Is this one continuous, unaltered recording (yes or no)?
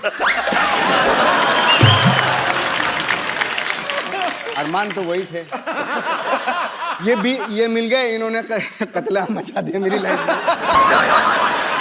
yes